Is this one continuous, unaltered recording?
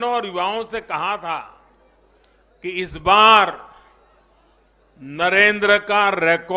yes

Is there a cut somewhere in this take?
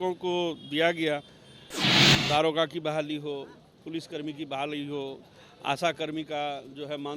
yes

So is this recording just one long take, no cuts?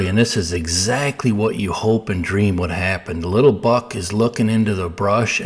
yes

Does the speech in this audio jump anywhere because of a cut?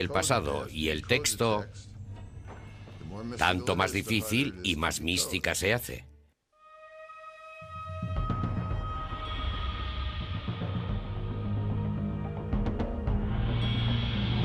no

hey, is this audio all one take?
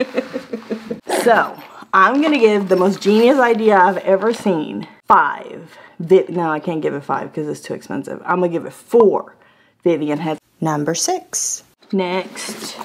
yes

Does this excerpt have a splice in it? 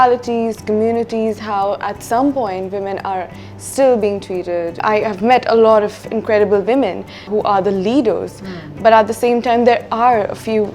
yes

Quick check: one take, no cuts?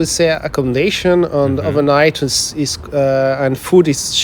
yes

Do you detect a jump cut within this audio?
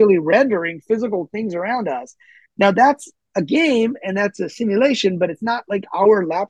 no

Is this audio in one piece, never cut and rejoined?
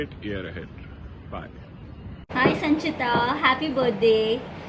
no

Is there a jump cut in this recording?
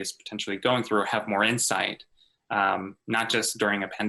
no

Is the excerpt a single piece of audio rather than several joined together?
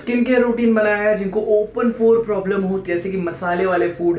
no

